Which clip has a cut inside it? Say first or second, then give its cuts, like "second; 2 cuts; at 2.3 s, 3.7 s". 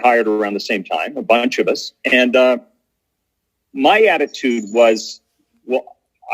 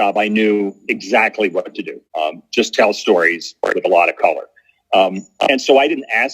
second; 1 cut; at 2.0 s